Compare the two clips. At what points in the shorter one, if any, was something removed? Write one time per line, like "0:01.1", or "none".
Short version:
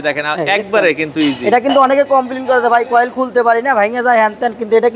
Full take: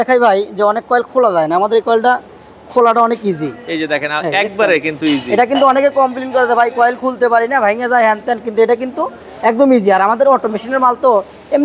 none